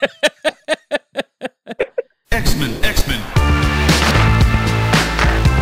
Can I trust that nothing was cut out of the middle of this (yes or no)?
no